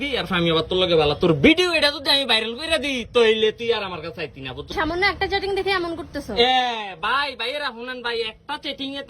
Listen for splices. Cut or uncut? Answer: cut